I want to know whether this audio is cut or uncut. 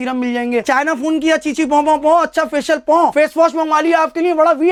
uncut